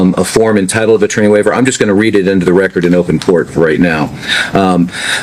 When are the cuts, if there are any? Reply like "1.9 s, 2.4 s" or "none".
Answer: 3.9 s